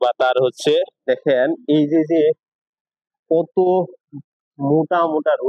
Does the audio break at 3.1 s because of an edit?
no; 1 cut; at 1.1 s

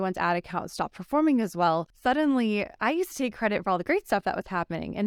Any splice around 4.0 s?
no; 1 cut; at 1.9 s

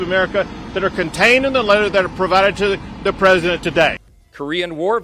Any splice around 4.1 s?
yes; 1 cut; at 4.1 s

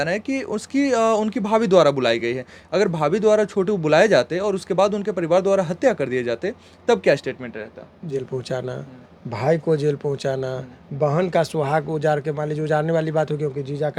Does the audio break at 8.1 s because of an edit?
yes; 1 cut; at 8.1 s

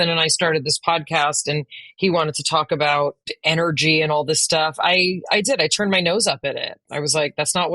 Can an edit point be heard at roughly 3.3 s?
yes; 1 cut; at 3.3 s

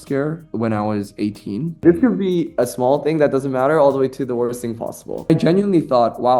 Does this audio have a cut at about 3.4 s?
no; 2 cuts; at 1.8 s, 5.3 s

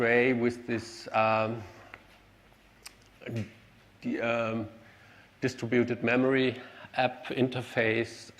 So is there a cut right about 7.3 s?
yes; 1 cut; at 7.3 s

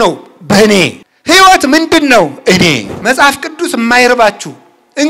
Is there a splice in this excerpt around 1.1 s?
yes; 2 cuts; at 1.1 s, 2.9 s

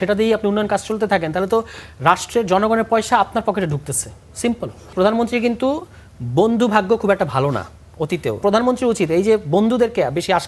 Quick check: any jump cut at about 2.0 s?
no; 2 cuts; at 4.9 s, 8.4 s

